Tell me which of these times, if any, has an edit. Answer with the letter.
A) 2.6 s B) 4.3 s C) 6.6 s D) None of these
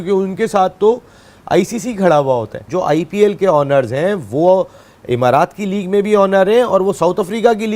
A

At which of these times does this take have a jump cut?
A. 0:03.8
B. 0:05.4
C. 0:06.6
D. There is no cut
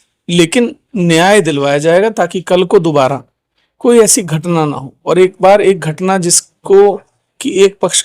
D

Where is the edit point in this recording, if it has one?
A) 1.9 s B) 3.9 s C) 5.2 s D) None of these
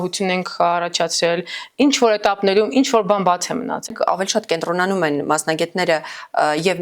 B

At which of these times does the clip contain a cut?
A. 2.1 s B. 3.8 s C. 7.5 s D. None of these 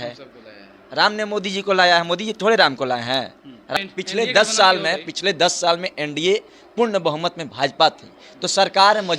B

